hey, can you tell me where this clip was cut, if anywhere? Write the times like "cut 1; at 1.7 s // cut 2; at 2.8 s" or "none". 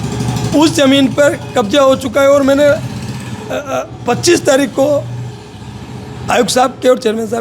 none